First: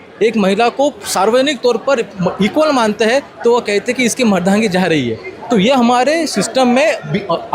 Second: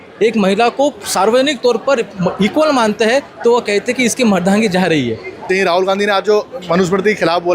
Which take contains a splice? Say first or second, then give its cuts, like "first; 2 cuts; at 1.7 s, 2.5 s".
second; 1 cut; at 5.4 s